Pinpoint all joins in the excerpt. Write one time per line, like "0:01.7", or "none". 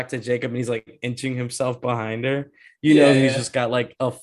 none